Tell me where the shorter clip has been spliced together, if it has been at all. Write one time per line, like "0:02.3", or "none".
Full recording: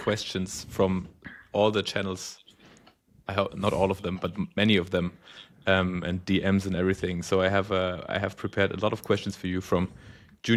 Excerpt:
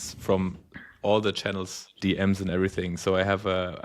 0:02.0